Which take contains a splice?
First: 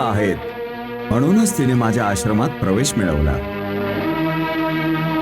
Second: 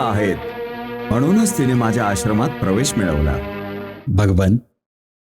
second; 1 cut; at 3.7 s

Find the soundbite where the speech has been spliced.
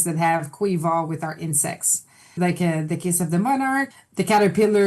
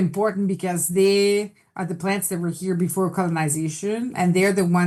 first; 2 cuts; at 2.4 s, 3.9 s

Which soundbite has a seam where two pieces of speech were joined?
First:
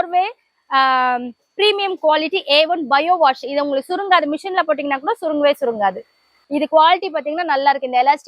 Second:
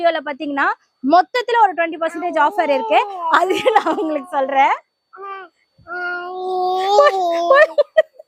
first; 1 cut; at 6.1 s

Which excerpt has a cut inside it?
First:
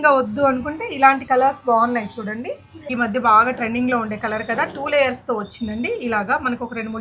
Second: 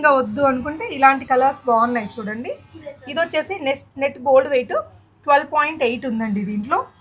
first; 1 cut; at 2.7 s

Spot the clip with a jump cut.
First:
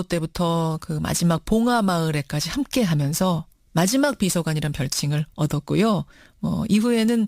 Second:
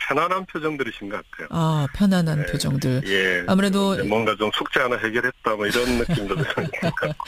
first; 1 cut; at 1.2 s

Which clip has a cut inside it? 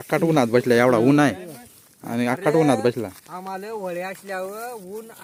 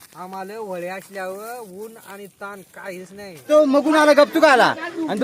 second; 1 cut; at 3.4 s

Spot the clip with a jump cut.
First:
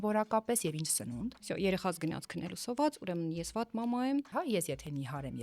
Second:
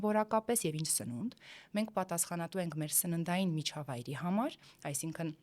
first; 2 cuts; at 1.4 s, 4.3 s

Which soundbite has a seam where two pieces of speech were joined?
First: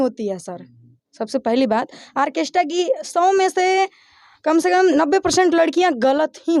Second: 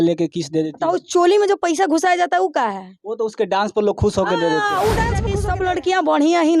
second; 1 cut; at 5.3 s

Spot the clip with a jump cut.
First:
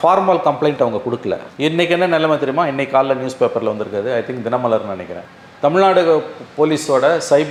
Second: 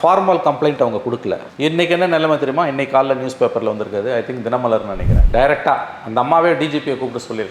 second; 1 cut; at 5.2 s

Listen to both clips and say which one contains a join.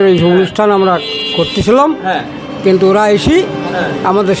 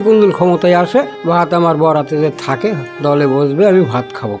second; 2 cuts; at 1.2 s, 2.9 s

